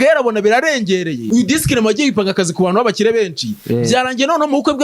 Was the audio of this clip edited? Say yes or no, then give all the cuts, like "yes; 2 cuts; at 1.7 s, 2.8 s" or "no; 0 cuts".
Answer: yes; 1 cut; at 1.2 s